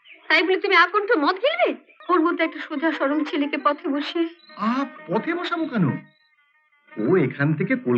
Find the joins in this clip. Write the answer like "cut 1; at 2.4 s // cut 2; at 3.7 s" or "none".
cut 1; at 1.9 s